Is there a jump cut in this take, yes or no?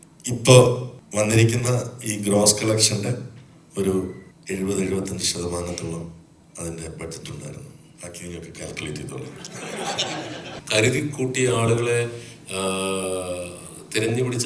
yes